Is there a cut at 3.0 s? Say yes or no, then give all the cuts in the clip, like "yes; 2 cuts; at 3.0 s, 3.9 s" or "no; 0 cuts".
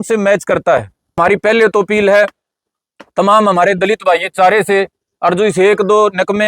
no; 1 cut; at 1.1 s